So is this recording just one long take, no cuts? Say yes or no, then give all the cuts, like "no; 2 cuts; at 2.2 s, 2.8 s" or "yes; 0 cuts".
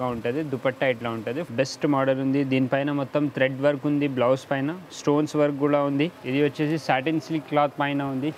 no; 2 cuts; at 1.4 s, 6.2 s